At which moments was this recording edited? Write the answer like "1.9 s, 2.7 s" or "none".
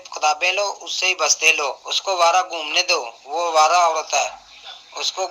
1.9 s